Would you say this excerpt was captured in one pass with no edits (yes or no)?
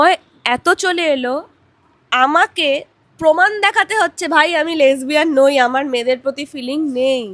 yes